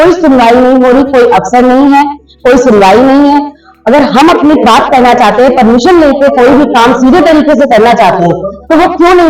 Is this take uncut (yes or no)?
yes